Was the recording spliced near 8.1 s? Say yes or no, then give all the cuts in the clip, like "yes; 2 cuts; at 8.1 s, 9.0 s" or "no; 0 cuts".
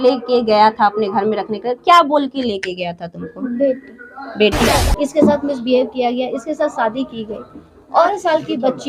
yes; 2 cuts; at 4.8 s, 8.1 s